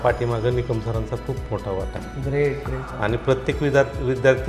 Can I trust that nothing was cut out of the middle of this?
no; 1 cut; at 2.9 s

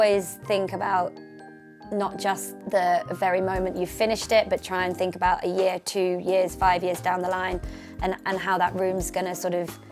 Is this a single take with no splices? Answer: no; 1 cut; at 2.5 s

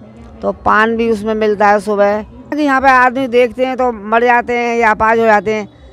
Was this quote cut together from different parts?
yes; 1 cut; at 2.6 s

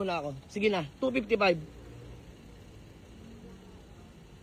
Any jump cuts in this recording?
no; 0 cuts

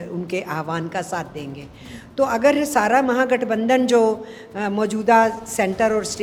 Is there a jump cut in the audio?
no; 0 cuts

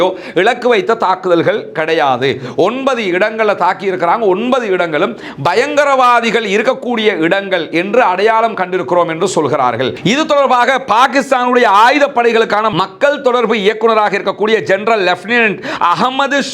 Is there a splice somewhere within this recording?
no; 0 cuts

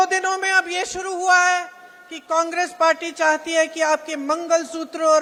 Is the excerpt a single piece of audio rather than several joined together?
yes; 0 cuts

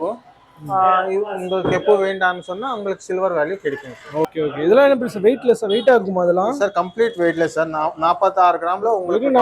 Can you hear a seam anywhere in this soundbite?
yes; 1 cut; at 4.3 s

